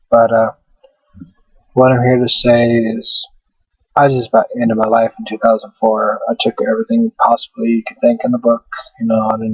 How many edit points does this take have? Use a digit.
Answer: 1